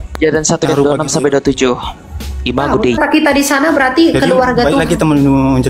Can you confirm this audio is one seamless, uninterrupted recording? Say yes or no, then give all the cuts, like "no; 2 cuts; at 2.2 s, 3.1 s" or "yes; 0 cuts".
no; 1 cut; at 3.0 s